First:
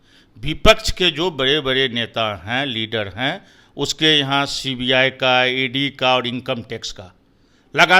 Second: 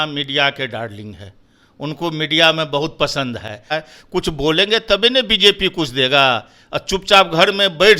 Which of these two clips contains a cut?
second; 1 cut; at 3.7 s

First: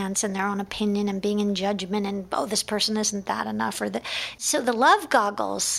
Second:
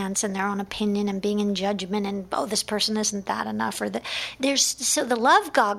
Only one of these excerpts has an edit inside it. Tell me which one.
first; 1 cut; at 4.3 s

